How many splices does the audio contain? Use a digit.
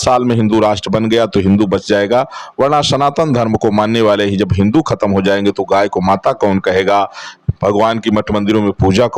0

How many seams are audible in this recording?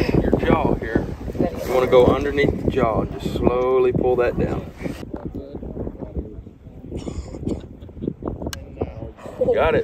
1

